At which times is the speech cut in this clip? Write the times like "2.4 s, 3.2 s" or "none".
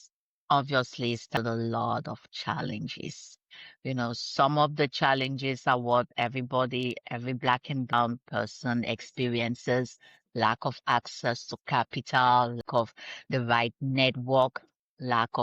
1.4 s, 7.9 s, 12.6 s